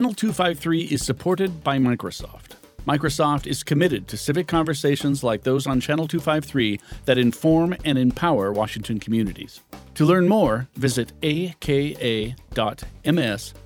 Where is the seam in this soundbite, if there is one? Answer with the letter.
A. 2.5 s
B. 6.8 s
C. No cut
C